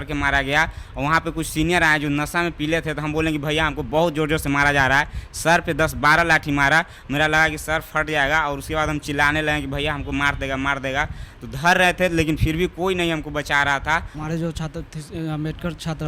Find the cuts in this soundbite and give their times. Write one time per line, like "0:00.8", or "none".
0:14.1

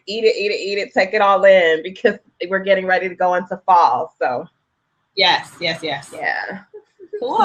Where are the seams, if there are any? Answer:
none

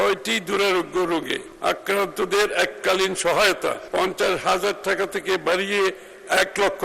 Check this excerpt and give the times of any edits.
0:01.4
0:03.8

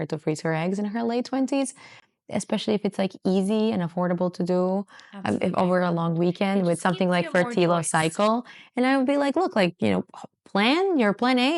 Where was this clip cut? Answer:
none

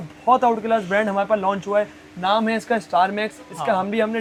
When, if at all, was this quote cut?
none

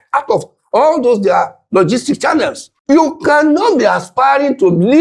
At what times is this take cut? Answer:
0:02.7

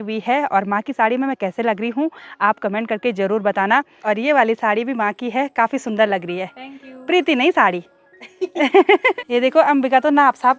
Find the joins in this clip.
0:04.0
0:09.2

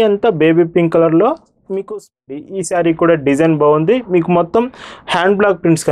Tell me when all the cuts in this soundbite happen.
0:02.2

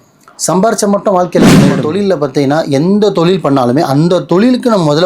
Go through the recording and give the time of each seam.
0:01.8

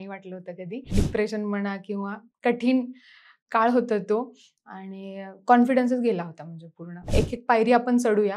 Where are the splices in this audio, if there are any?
0:00.9
0:07.1

